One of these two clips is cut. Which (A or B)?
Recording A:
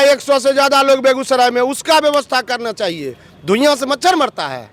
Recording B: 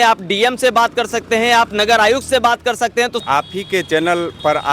B